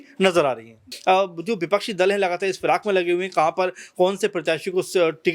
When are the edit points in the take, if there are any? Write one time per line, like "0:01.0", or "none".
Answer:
0:00.9